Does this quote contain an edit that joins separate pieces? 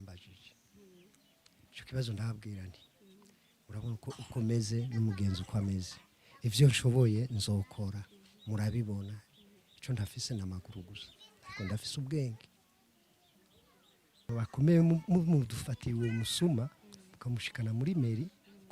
yes; 1 cut; at 14.3 s

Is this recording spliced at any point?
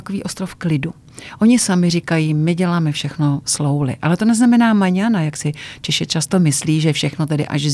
no; 0 cuts

